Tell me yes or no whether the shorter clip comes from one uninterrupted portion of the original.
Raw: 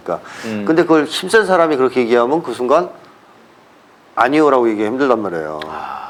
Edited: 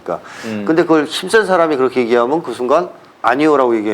no